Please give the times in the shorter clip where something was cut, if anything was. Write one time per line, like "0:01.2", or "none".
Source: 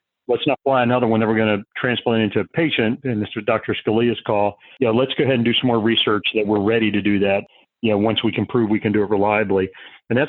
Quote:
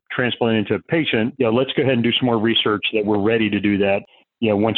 0:01.3

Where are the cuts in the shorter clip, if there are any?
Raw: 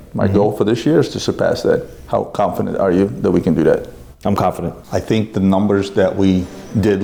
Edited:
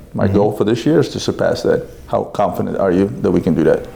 none

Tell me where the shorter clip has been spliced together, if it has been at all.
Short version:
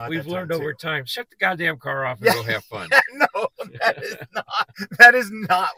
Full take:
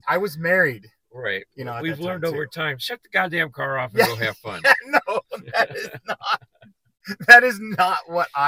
0:04.7

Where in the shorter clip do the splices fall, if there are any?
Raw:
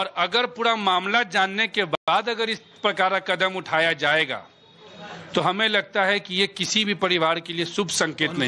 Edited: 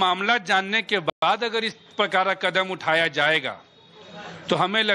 none

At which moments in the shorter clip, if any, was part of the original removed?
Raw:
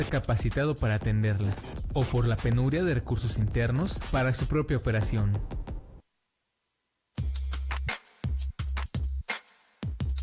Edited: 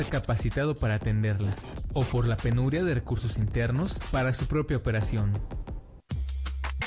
0:05.9

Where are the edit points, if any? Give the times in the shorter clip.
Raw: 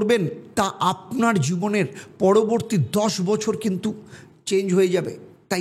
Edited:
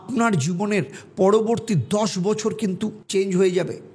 0:03.0

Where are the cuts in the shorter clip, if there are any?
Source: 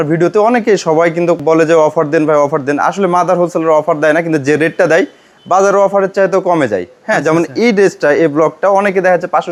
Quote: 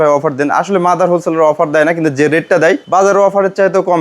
0:02.8

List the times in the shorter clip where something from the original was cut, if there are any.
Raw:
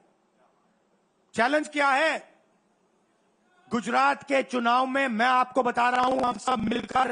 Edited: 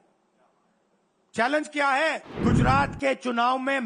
0:02.3

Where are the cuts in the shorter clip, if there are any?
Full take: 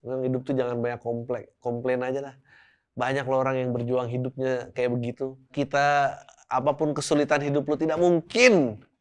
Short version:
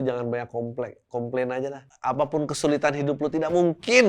0:01.9

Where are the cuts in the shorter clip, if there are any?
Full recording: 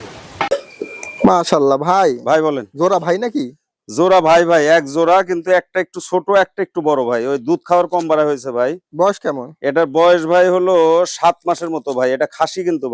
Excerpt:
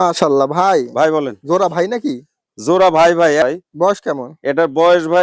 0:03.4

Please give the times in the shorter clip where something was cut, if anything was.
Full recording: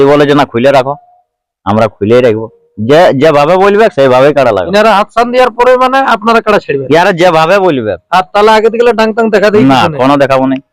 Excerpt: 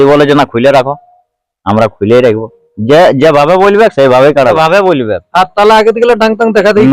0:04.5

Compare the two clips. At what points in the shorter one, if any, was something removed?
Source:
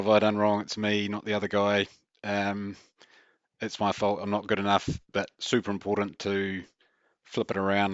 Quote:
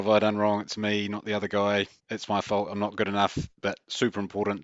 0:02.0

